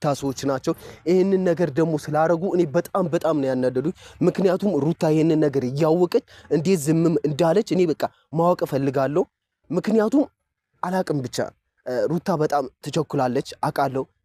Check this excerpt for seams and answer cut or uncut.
uncut